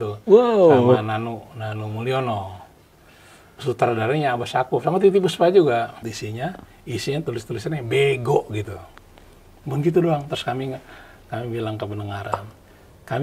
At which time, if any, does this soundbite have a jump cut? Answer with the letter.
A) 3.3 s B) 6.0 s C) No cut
B